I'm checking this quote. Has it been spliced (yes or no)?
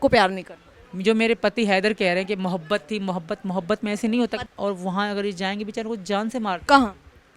yes